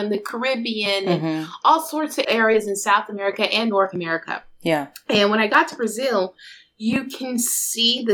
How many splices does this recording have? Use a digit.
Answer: 1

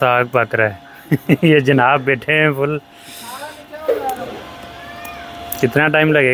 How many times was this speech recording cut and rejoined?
0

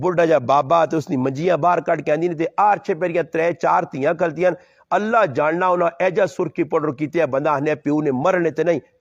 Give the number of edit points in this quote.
0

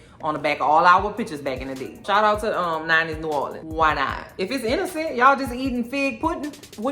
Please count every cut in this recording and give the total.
1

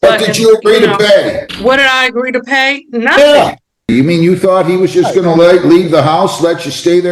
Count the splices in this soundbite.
2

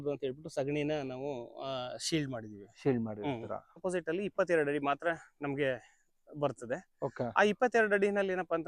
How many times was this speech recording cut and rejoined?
1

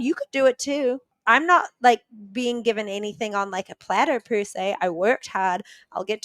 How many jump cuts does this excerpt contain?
1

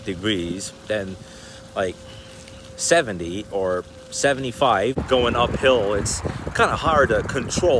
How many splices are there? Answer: 1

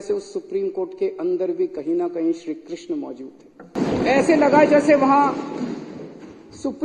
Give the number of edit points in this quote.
1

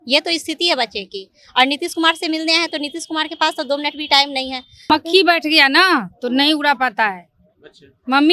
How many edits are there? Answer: 1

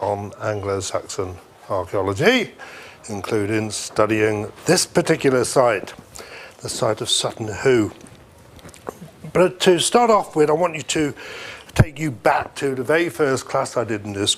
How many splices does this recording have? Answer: 0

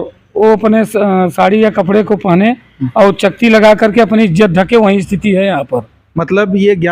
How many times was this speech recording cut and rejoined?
0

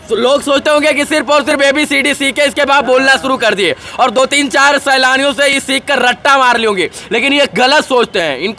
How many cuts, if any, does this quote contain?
0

